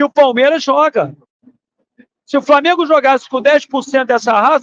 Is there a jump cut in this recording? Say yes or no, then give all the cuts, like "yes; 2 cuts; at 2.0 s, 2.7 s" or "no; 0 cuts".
no; 0 cuts